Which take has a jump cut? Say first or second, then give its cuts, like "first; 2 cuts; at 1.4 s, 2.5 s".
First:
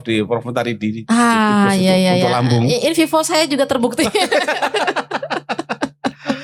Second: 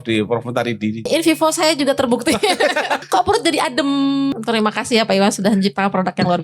second; 3 cuts; at 1.0 s, 3.0 s, 4.3 s